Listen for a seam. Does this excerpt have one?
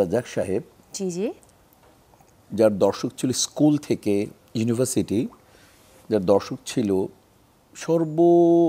no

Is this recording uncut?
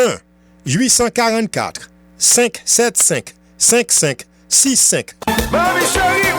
no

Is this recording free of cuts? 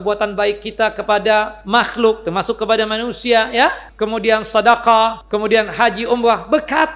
no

